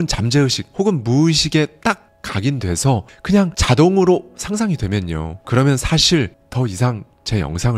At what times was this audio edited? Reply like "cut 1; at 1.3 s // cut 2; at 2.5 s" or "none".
none